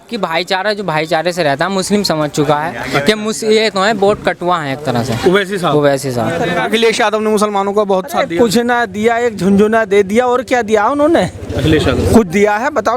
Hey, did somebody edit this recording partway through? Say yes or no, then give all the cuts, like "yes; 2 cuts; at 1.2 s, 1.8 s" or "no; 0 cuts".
yes; 1 cut; at 6.5 s